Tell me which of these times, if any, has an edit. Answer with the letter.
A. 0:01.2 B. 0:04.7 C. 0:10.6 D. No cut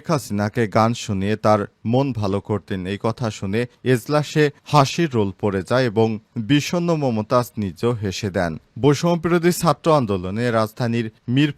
D